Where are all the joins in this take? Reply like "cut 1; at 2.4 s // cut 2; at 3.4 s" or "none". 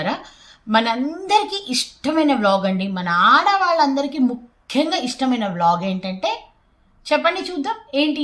none